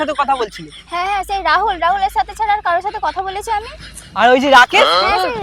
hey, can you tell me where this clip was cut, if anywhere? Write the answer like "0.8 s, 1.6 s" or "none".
none

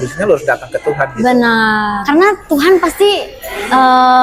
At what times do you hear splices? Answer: 2.0 s

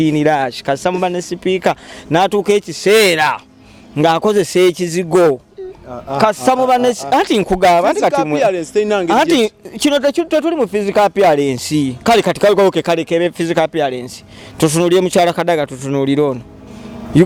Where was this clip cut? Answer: none

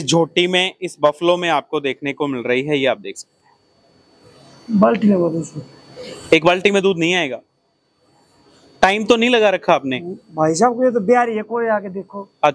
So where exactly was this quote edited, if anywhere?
none

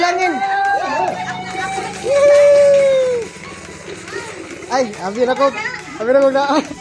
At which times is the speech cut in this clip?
none

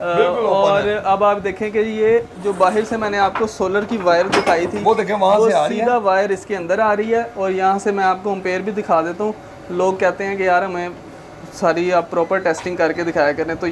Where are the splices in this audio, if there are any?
none

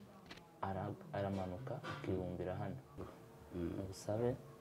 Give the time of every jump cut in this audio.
3.1 s

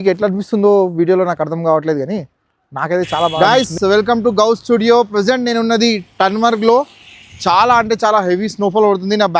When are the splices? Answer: 3.3 s

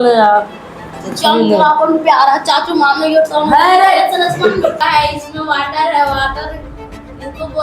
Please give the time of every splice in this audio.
4.8 s

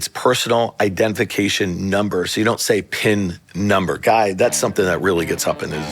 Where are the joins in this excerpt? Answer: none

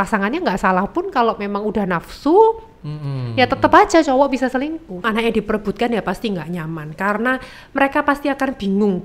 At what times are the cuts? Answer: 5.0 s

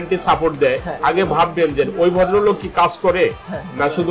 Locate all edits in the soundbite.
none

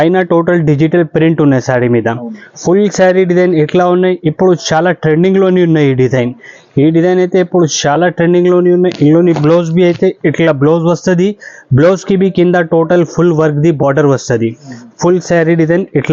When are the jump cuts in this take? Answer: none

